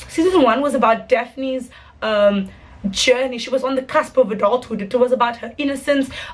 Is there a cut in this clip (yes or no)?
no